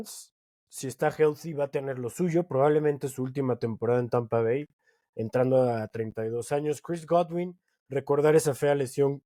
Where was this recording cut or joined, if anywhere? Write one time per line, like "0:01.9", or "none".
none